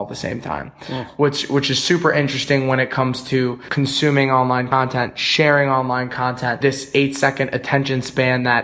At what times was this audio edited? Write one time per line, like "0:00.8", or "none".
0:03.6
0:04.7
0:06.6